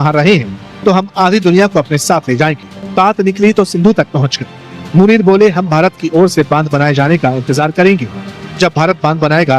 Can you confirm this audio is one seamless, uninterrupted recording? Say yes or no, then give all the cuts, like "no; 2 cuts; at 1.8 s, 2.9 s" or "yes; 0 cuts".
yes; 0 cuts